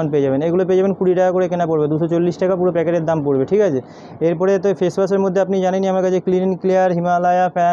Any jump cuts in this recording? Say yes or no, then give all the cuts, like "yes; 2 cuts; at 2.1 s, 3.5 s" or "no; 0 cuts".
no; 0 cuts